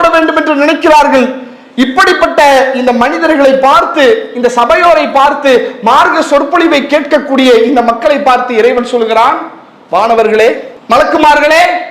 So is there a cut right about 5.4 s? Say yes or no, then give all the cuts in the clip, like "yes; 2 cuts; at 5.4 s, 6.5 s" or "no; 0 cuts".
no; 1 cut; at 10.7 s